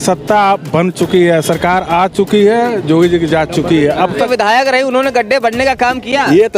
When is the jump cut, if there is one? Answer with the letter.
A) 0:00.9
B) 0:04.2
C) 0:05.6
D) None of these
B